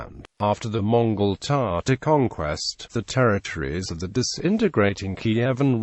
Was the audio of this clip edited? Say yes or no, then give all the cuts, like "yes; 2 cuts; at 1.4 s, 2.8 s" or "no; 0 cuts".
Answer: yes; 1 cut; at 1.4 s